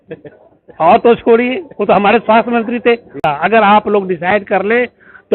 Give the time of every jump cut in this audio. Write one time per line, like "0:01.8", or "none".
0:03.2